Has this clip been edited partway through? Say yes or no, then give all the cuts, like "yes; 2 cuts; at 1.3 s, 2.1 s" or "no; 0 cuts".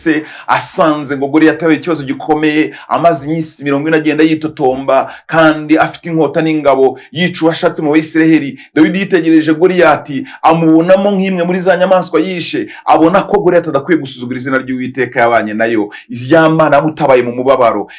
no; 0 cuts